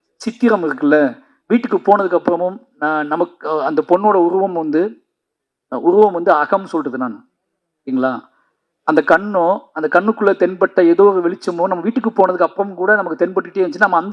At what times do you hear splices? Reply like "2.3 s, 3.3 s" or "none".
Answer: none